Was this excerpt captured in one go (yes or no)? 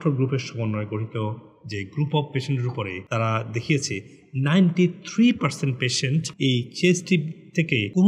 yes